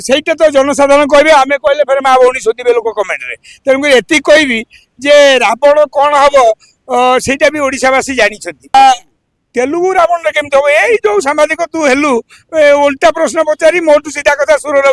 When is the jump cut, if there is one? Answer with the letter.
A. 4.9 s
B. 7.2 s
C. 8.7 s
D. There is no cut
C